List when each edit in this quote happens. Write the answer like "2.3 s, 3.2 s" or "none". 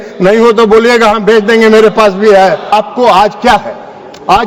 2.7 s

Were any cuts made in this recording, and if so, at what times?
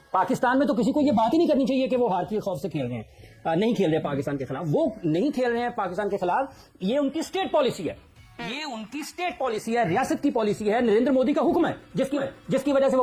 none

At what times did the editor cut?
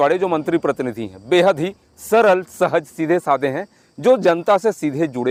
none

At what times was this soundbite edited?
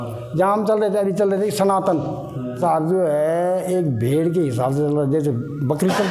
2.6 s

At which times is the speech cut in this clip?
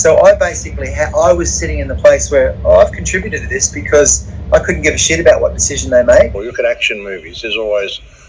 6.4 s

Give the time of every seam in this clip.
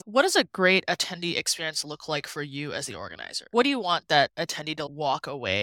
none

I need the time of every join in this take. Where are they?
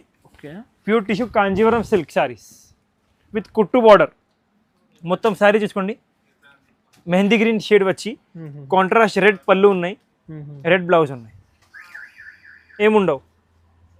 none

